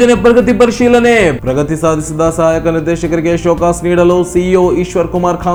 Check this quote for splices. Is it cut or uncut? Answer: uncut